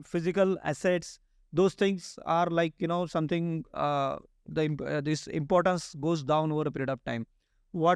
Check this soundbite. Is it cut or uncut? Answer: uncut